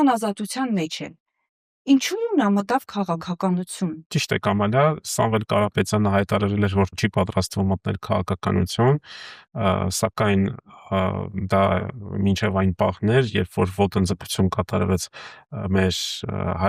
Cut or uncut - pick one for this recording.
uncut